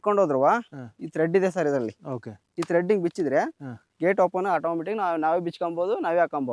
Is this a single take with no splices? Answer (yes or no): yes